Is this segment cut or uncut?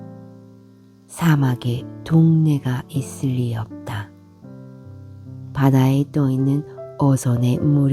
uncut